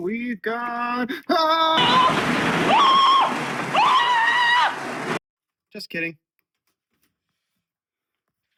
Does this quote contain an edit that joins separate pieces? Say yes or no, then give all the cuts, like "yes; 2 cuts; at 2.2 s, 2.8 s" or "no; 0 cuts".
no; 0 cuts